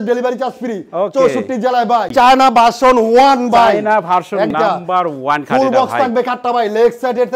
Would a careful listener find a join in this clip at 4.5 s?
yes; 2 cuts; at 2.1 s, 4.5 s

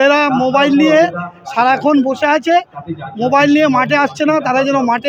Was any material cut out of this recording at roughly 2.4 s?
no; 0 cuts

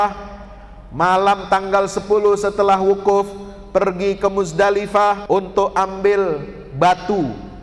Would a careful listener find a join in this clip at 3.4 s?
no; 1 cut; at 5.2 s

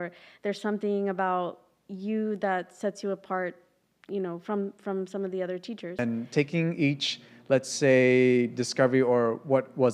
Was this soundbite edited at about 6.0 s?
yes; 1 cut; at 6.0 s

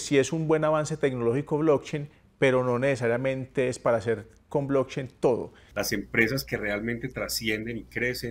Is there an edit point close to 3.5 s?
no; 1 cut; at 5.6 s

